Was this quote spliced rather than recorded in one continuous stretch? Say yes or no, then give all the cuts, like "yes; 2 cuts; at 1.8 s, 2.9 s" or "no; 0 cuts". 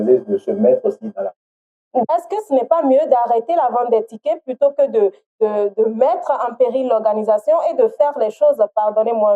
yes; 1 cut; at 2.1 s